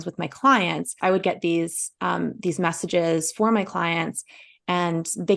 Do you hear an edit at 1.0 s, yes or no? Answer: yes